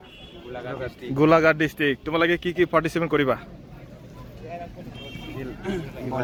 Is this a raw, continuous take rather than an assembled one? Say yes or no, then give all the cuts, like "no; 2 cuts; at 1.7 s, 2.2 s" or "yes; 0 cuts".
yes; 0 cuts